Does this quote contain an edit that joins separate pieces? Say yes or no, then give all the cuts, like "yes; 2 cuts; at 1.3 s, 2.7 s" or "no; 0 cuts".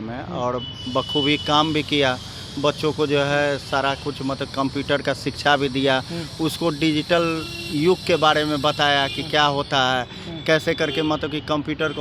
no; 0 cuts